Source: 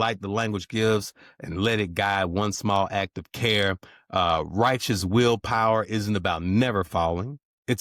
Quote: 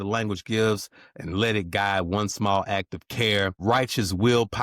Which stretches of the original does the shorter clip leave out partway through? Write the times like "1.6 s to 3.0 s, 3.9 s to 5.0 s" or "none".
3.8 s to 4.5 s